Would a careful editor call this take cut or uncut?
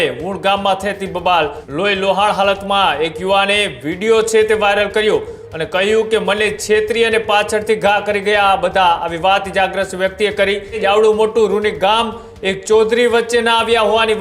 cut